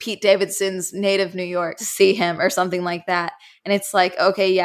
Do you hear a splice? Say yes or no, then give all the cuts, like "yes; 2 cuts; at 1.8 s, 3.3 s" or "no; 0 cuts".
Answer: yes; 1 cut; at 1.8 s